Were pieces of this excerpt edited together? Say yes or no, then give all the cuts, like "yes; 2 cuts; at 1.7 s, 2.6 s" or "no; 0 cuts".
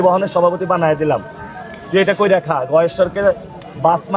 no; 0 cuts